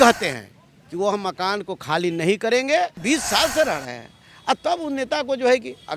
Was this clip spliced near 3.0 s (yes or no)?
yes